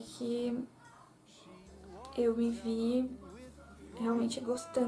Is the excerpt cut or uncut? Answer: uncut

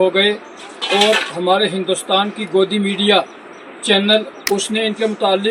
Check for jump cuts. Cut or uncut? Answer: cut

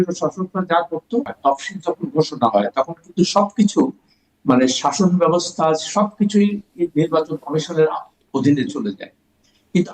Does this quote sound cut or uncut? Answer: cut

